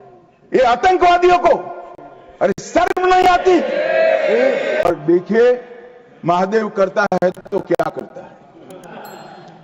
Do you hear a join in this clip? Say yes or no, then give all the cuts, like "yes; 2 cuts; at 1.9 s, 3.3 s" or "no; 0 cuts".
yes; 1 cut; at 4.8 s